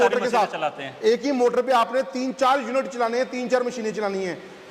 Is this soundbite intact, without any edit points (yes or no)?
yes